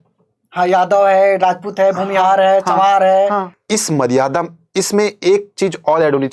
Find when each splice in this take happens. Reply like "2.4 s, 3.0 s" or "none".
3.6 s